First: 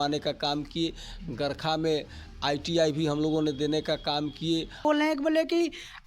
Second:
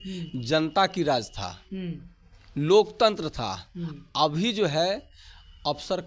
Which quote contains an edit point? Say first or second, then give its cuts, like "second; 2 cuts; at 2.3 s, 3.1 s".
first; 1 cut; at 4.8 s